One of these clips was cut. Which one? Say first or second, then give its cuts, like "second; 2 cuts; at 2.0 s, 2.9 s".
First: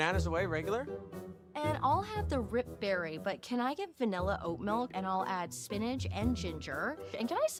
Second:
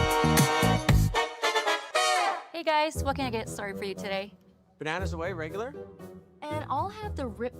second; 1 cut; at 2.5 s